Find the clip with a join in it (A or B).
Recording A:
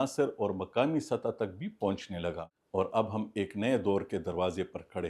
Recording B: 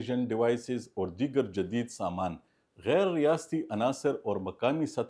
A